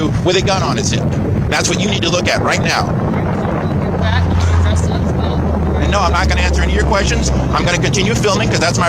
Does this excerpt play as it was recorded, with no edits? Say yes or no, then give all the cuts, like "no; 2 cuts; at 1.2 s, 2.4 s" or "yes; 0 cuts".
yes; 0 cuts